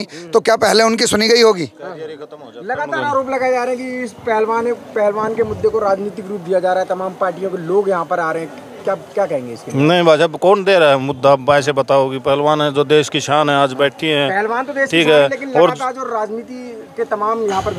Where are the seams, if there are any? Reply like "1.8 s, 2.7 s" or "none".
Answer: none